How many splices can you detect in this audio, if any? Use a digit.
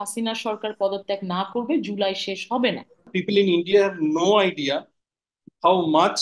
1